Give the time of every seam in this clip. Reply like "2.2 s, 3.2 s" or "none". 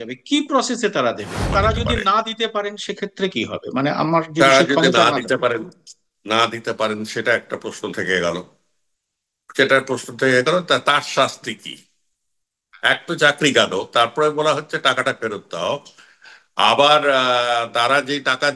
1.5 s